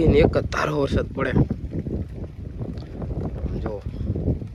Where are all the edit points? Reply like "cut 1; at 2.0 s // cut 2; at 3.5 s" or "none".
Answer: none